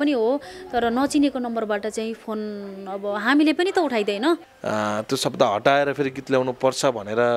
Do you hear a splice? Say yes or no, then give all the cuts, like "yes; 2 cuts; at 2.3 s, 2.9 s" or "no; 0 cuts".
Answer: yes; 1 cut; at 4.5 s